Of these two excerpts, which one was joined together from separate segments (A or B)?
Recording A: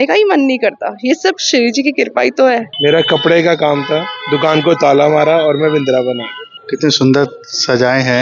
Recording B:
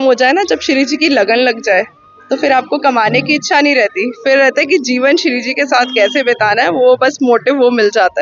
A